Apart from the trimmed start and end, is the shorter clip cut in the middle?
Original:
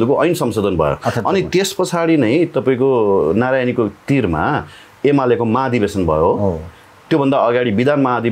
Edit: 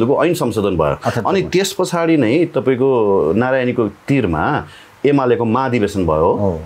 no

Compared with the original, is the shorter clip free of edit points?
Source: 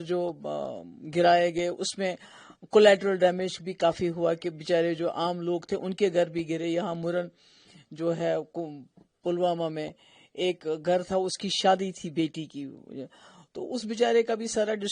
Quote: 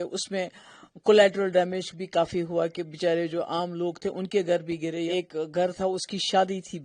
no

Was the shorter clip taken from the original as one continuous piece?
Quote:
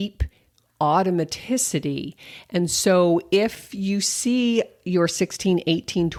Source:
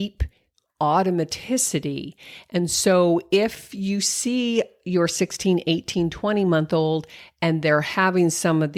yes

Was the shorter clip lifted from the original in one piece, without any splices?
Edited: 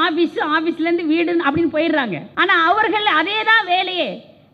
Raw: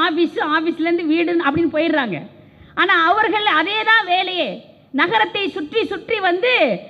no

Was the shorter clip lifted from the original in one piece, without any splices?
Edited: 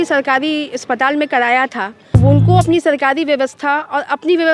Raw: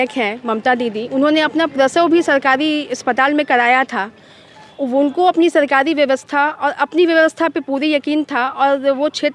no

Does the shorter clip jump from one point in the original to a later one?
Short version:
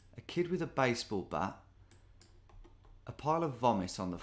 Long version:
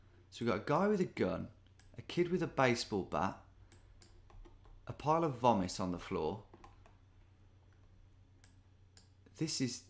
no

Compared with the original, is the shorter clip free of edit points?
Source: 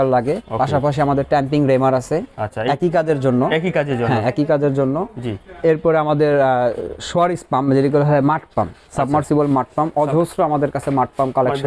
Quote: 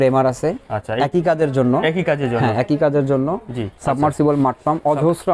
no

